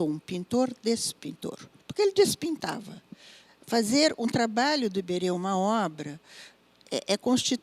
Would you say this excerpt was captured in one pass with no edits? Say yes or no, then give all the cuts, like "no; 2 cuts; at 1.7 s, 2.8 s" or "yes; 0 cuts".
yes; 0 cuts